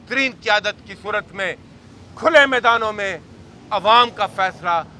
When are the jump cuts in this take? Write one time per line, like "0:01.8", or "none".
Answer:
none

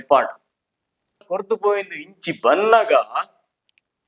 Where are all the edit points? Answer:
0:01.3

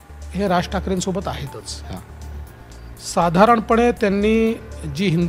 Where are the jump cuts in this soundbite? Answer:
none

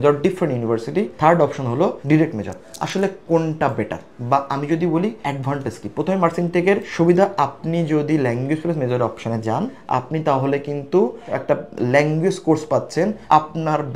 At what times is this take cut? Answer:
none

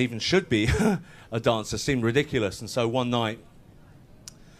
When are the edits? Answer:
0:01.8

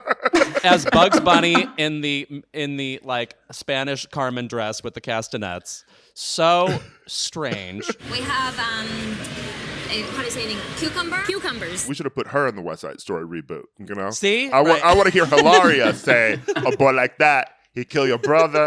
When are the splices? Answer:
0:08.0
0:11.8

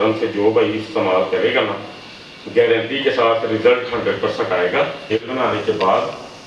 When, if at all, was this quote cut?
0:05.2

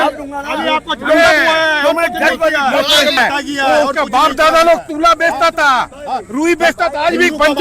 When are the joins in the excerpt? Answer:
0:03.2

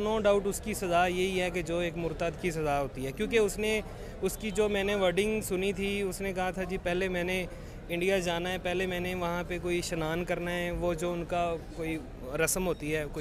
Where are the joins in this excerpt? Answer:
none

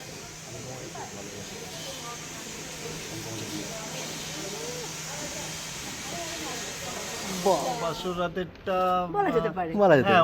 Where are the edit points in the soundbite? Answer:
0:07.9

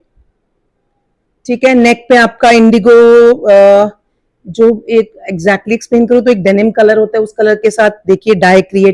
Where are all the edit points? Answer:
none

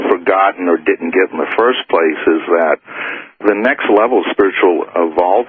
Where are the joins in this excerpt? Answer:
0:04.3

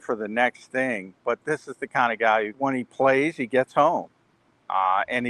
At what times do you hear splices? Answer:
0:01.4
0:02.5

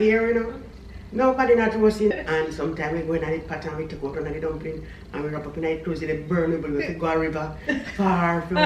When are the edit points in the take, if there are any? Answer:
0:02.1

